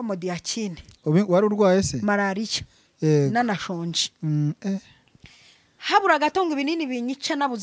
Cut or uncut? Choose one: uncut